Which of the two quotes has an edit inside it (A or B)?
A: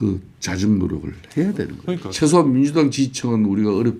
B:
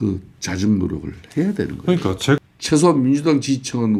A